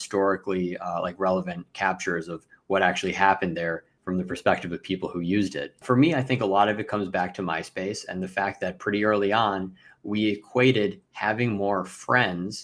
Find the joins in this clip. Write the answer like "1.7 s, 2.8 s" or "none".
3.9 s, 5.8 s